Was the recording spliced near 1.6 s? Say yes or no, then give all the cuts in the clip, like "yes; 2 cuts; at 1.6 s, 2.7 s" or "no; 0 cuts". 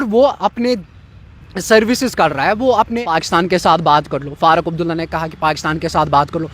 no; 1 cut; at 3.1 s